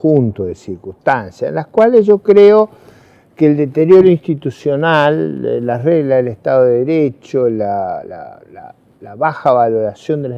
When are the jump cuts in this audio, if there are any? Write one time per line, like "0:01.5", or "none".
0:04.3